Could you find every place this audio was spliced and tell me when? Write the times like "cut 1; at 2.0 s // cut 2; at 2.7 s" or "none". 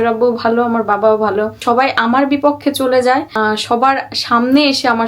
cut 1; at 1.6 s // cut 2; at 3.3 s